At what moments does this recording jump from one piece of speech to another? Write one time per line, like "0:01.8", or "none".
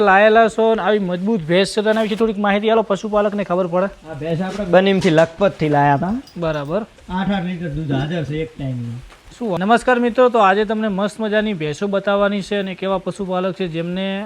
0:09.6